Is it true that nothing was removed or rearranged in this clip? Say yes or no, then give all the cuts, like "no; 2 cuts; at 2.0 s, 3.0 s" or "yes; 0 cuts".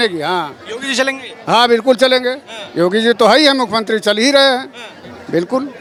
yes; 0 cuts